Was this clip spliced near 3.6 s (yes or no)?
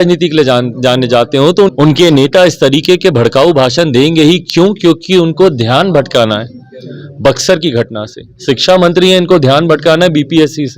no